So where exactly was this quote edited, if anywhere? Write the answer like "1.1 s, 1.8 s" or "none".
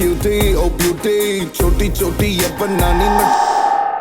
3.0 s